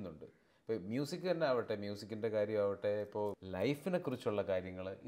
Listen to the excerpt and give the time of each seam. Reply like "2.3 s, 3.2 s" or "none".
3.4 s